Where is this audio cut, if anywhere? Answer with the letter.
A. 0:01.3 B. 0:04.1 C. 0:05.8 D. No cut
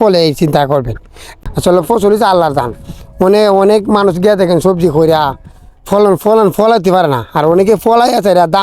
A